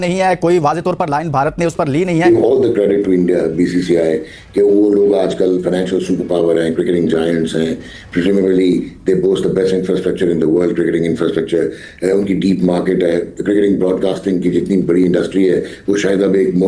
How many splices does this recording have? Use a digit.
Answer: 1